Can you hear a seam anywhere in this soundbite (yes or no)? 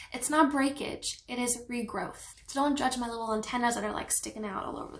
yes